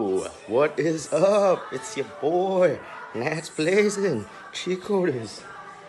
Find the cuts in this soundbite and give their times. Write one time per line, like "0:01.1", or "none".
none